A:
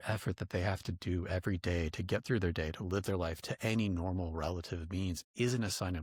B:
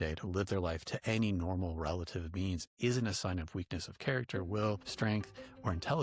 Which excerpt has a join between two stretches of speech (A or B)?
B